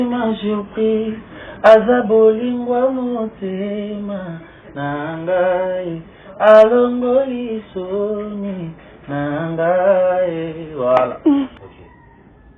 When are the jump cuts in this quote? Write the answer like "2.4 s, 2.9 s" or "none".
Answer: 11.5 s